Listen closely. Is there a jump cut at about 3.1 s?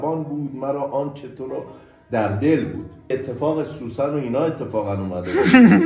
yes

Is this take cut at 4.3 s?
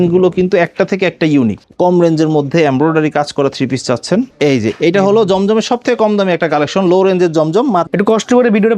yes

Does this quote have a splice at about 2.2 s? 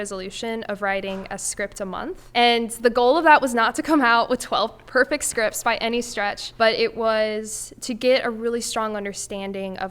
yes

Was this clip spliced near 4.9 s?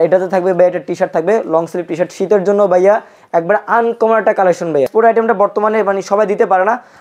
yes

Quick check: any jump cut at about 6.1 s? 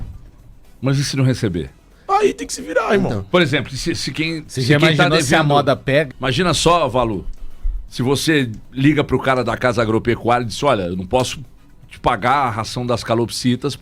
yes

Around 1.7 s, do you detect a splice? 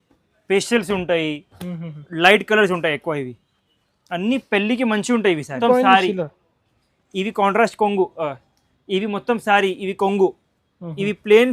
no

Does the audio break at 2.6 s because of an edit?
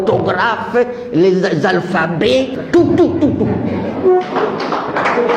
yes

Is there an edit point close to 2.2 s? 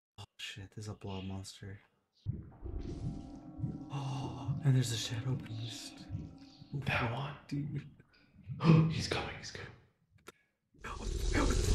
yes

